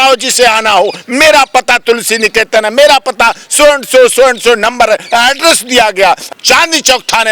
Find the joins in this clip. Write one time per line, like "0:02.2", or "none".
0:06.2